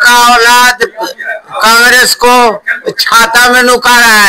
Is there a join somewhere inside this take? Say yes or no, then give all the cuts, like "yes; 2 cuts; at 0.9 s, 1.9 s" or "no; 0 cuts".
no; 0 cuts